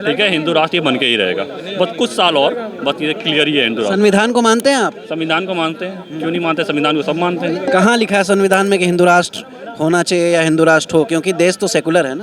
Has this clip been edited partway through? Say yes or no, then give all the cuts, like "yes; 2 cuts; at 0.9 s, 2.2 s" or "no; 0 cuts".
no; 0 cuts